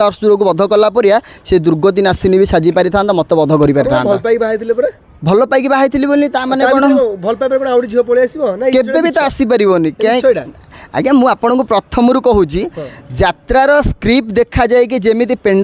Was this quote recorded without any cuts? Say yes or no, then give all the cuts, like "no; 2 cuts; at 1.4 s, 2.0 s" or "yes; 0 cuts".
yes; 0 cuts